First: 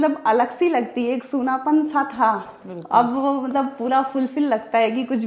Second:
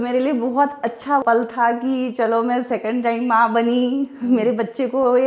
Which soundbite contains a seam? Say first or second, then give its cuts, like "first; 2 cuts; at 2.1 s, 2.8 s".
second; 1 cut; at 1.2 s